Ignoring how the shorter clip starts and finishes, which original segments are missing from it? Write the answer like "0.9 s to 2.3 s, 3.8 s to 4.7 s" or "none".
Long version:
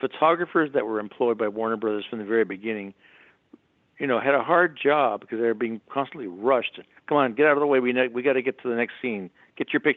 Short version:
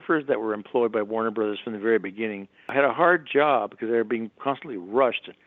3.2 s to 4.2 s